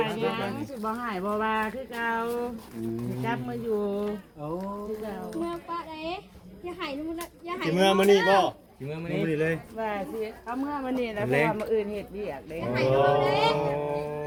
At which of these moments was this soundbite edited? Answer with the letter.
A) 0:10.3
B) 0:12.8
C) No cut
C